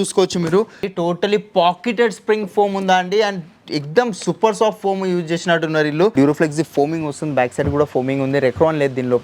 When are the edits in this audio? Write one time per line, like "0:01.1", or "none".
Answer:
0:00.9
0:06.1